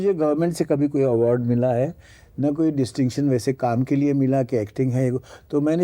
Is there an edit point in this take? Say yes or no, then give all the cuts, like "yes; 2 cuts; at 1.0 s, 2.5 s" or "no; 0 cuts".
no; 0 cuts